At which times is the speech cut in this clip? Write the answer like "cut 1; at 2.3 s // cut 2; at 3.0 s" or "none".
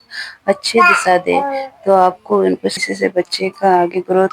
cut 1; at 2.9 s